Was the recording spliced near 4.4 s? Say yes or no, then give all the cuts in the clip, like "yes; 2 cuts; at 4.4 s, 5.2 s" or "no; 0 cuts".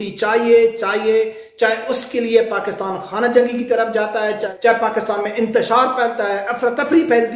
no; 0 cuts